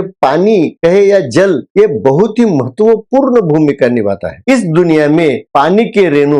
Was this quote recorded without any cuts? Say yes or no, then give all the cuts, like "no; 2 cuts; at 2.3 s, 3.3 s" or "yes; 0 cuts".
yes; 0 cuts